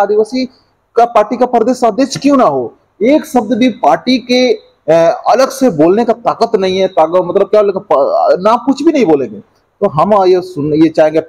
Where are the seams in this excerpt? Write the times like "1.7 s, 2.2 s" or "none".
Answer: none